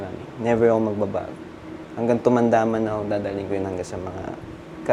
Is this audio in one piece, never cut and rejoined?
yes; 0 cuts

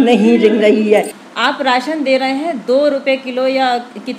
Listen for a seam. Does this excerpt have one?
yes; 1 cut; at 1.2 s

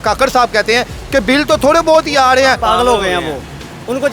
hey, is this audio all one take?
no; 1 cut; at 2.6 s

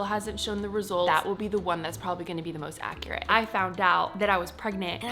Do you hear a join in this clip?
yes; 2 cuts; at 1.1 s, 3.2 s

